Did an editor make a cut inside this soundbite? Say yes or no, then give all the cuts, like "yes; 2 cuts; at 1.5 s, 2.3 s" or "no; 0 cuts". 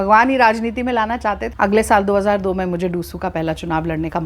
yes; 1 cut; at 1.5 s